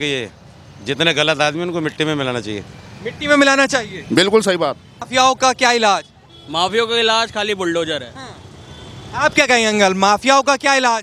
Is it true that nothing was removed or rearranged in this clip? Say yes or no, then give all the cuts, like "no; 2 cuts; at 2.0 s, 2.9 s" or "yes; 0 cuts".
no; 1 cut; at 4.9 s